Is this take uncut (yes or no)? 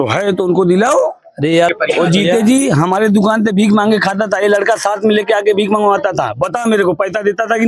no